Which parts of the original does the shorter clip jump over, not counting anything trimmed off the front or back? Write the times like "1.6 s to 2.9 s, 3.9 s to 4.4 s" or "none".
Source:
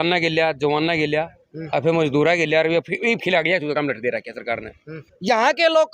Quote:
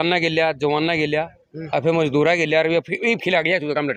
none

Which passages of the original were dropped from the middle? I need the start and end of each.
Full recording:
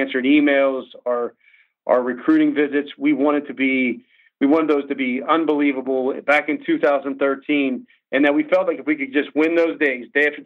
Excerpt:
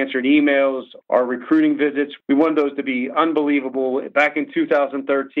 0.9 s to 1.7 s, 2.9 s to 4.3 s

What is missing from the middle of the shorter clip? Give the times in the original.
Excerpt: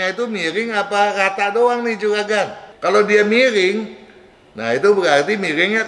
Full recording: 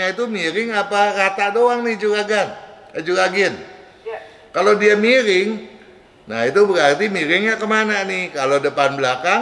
2.6 s to 4.4 s

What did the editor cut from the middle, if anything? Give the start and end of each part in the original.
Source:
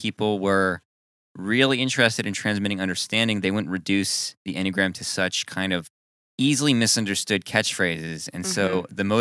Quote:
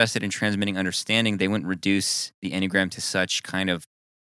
none

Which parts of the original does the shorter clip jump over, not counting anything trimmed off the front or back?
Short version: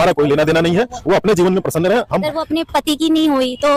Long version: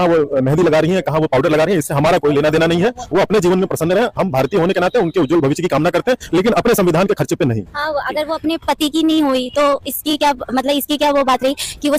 4.3 s to 8.2 s

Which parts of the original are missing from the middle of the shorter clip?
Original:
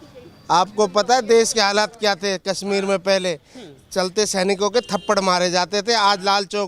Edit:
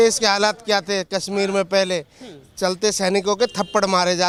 none

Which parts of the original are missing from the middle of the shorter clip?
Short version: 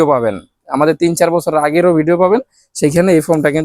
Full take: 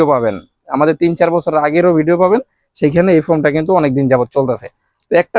none

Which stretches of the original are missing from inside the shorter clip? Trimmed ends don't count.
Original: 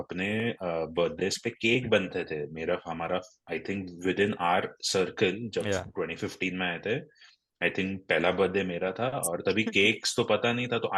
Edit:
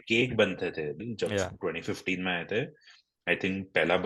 2.6 s to 5.4 s

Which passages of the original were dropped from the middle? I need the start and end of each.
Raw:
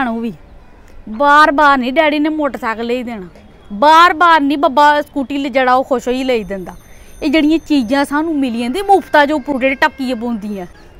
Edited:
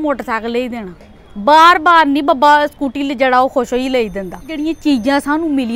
6.9 s to 7.4 s

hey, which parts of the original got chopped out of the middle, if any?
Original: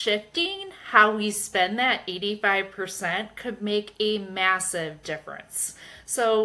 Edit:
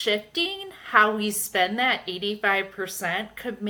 none

